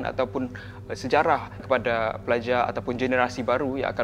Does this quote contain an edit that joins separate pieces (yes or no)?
yes